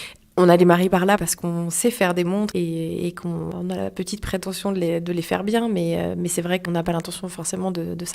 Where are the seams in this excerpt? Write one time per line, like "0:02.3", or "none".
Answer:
0:01.2
0:02.5
0:03.5
0:06.7